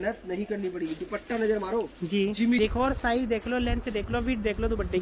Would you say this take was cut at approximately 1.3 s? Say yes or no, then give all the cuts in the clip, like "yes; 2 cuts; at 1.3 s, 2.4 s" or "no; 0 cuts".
no; 1 cut; at 2.6 s